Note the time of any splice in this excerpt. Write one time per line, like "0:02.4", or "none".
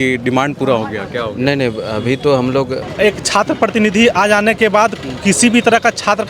0:02.9